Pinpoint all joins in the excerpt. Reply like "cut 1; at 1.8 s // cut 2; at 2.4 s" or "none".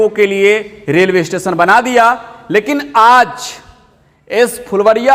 none

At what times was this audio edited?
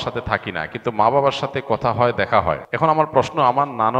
cut 1; at 2.7 s

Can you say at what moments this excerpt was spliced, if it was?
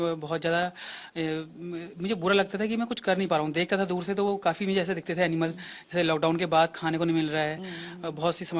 none

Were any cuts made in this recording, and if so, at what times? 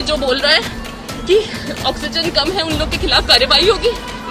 none

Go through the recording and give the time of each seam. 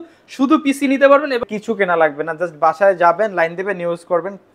cut 1; at 1.4 s

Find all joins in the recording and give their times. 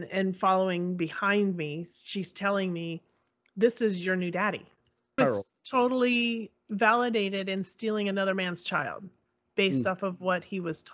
cut 1; at 5.2 s

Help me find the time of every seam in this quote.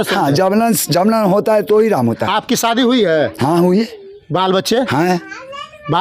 none

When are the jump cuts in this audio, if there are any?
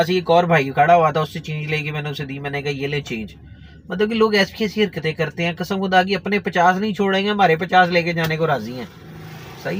none

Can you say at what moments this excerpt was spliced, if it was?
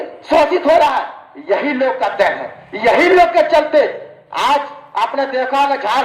none

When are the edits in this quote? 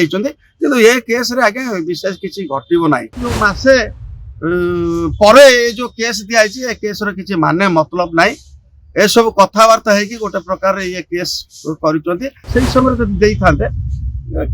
cut 1; at 3.3 s // cut 2; at 12.4 s

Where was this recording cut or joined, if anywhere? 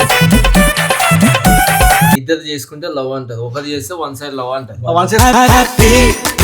cut 1; at 2.2 s

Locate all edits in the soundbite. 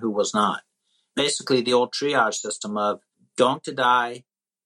cut 1; at 1.1 s // cut 2; at 3.2 s

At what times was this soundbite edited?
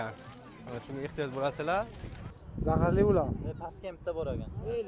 cut 1; at 2.5 s

